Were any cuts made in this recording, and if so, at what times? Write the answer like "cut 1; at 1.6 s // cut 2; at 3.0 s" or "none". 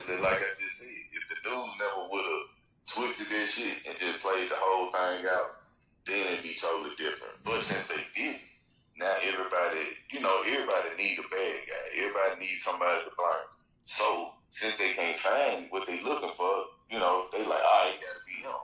none